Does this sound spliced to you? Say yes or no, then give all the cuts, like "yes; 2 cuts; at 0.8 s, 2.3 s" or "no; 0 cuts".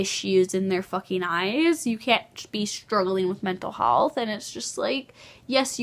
no; 0 cuts